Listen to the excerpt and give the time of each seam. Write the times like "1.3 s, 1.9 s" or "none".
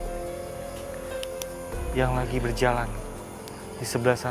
none

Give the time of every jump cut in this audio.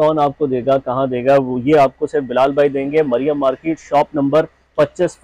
none

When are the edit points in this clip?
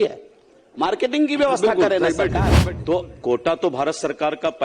2.5 s

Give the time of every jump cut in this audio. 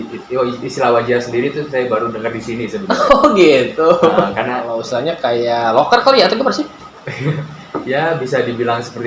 4.7 s

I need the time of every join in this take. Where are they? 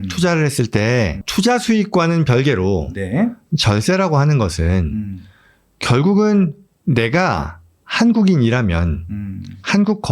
1.2 s

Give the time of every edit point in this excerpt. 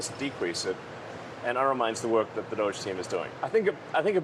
3.3 s

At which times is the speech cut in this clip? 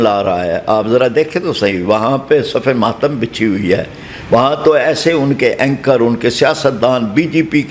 none

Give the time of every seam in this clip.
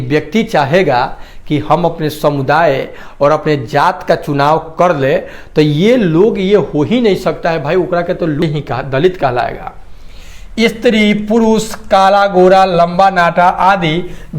8.4 s

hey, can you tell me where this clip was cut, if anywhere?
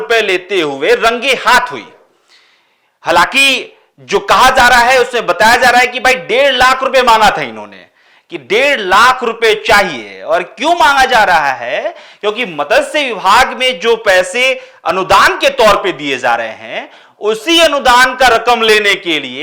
none

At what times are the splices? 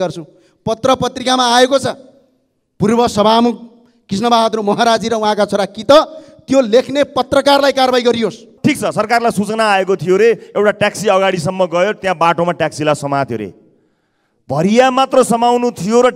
8.5 s

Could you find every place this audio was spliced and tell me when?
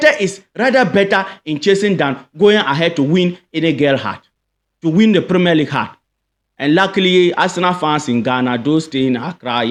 none

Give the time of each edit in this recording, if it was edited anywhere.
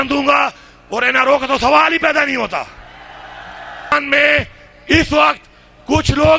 3.9 s

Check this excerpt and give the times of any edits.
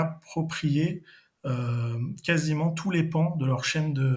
none

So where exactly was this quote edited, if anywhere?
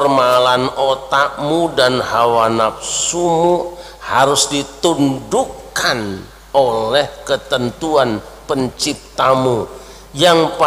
none

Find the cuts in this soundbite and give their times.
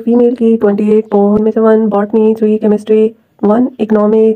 1.4 s

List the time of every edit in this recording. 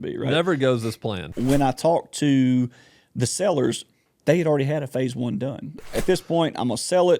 1.2 s, 5.8 s

